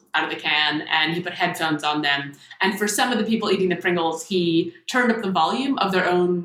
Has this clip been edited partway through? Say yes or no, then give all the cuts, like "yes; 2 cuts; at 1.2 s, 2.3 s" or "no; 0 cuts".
no; 0 cuts